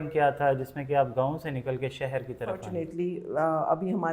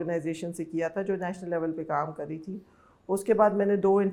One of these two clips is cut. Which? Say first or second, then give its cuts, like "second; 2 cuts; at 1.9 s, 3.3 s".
first; 1 cut; at 2.7 s